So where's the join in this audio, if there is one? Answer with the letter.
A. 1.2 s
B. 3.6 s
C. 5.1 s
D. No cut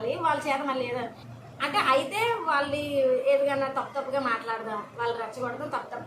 A